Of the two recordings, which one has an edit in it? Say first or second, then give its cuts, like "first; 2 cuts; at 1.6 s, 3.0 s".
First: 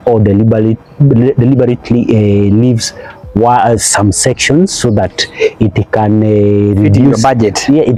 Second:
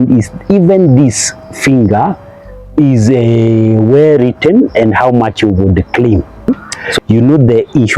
second; 1 cut; at 6.5 s